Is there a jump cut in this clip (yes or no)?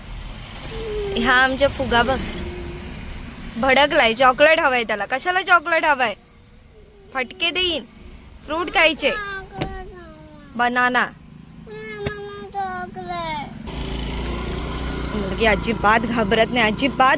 yes